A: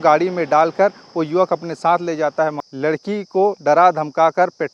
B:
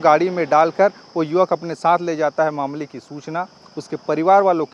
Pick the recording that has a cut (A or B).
A